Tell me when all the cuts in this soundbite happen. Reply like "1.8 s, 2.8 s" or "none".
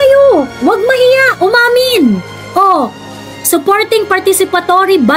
none

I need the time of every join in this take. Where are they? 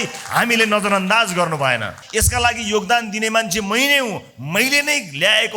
2.0 s

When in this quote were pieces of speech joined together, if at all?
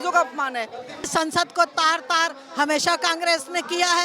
1.1 s

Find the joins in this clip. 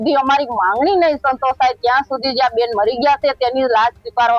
none

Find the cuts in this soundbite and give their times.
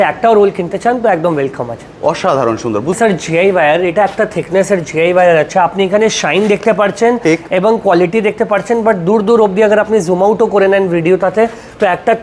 3.0 s

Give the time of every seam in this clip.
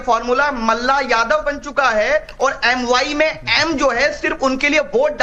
none

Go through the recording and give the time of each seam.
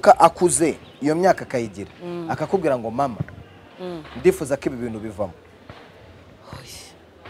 none

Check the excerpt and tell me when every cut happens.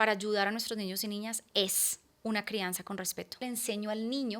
3.4 s

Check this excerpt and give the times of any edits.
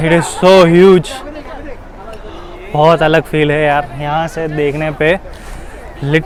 none

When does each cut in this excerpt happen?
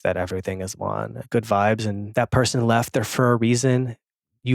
1.2 s, 2.1 s

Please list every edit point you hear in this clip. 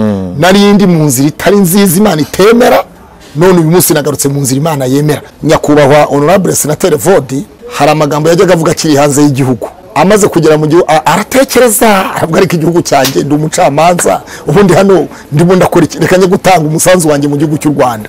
5.3 s, 7.6 s, 9.8 s

